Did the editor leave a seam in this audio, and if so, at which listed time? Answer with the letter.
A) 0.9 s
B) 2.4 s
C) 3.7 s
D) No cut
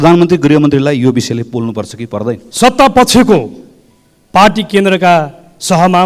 B